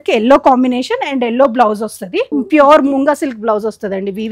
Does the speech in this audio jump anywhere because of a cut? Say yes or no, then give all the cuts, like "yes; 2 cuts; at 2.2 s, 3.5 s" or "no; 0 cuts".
yes; 1 cut; at 2.3 s